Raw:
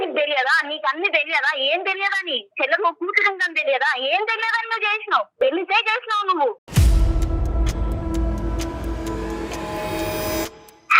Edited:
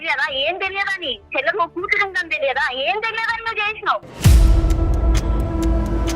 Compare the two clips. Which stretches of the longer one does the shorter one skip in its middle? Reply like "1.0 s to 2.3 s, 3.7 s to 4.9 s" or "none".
5.3 s to 6.6 s